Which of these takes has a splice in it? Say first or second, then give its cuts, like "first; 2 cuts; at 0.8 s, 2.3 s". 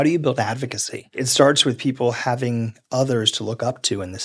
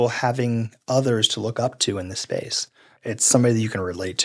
first; 1 cut; at 1.1 s